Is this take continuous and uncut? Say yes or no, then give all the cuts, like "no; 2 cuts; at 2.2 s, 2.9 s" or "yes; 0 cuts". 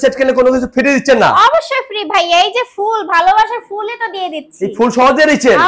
yes; 0 cuts